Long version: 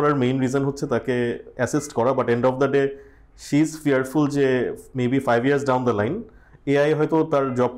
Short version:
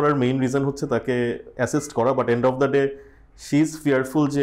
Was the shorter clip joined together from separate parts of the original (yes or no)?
no